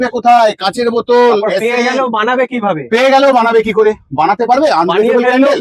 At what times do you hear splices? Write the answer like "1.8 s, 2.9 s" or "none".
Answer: none